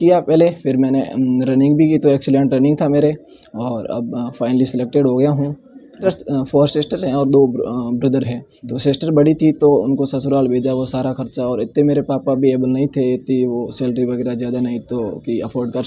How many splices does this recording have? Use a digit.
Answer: 1